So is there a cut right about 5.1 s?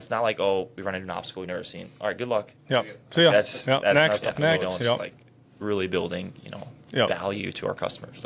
yes; 1 cut; at 5.1 s

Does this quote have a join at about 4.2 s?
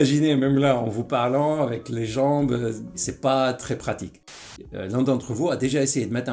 yes; 2 cuts; at 3.1 s, 4.2 s

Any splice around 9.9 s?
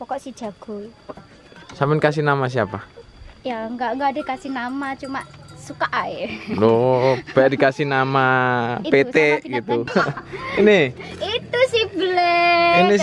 yes; 1 cut; at 9.9 s

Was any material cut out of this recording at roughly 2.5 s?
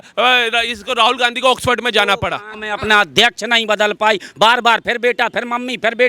yes; 1 cut; at 2.5 s

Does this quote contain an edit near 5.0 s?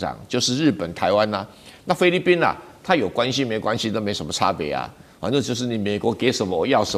no; 0 cuts

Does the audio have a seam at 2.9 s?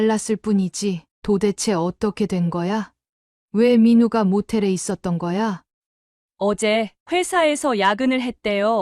no; 2 cuts; at 1.1 s, 5.7 s

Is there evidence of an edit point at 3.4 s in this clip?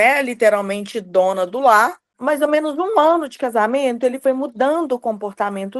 no; 1 cut; at 2.1 s

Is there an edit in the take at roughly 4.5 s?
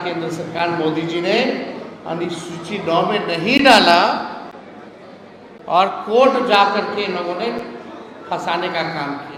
no; 0 cuts

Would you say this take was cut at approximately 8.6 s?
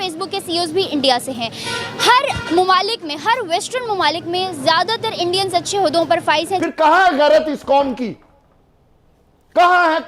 no; 1 cut; at 6.6 s

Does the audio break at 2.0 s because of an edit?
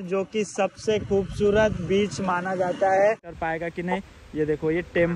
no; 1 cut; at 3.3 s

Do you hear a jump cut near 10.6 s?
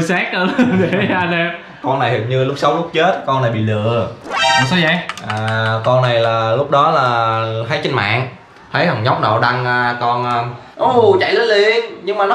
yes; 1 cut; at 10.6 s

